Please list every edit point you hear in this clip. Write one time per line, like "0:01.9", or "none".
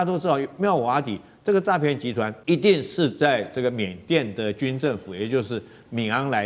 0:02.4